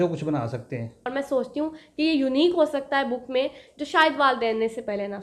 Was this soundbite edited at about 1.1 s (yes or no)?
yes